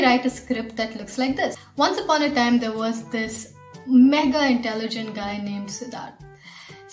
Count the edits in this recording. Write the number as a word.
one